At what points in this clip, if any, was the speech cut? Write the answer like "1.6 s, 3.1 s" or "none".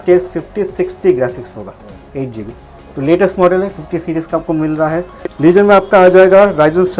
5.2 s